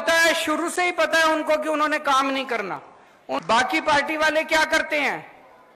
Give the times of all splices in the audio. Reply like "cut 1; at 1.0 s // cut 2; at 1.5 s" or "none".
cut 1; at 3.4 s